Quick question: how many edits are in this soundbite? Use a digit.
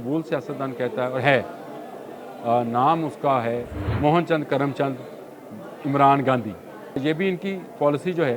2